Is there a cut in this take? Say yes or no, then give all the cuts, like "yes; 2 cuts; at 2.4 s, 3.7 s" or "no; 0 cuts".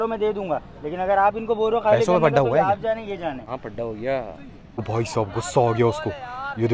yes; 1 cut; at 4.8 s